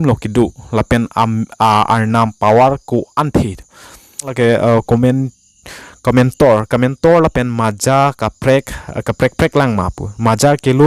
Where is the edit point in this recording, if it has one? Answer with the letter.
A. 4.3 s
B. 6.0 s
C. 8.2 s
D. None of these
A